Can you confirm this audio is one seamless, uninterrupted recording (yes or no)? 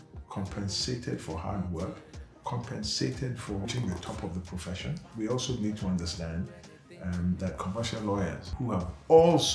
no